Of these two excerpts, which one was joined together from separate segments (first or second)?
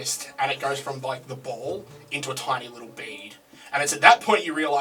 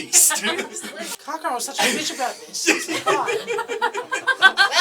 second